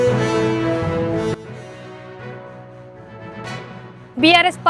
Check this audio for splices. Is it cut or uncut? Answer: cut